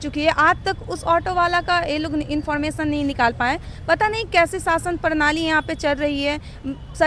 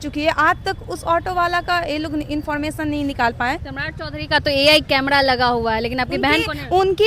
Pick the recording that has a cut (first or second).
second